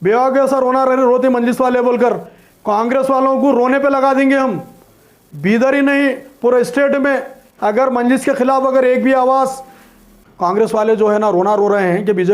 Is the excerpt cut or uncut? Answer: cut